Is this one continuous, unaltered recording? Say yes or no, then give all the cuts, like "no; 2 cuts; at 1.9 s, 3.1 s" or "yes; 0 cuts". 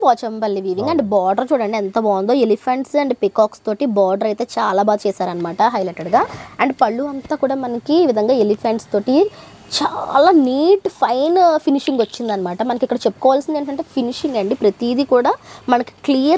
yes; 0 cuts